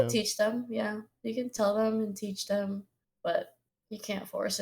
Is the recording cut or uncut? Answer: uncut